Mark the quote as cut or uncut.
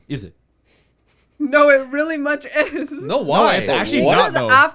uncut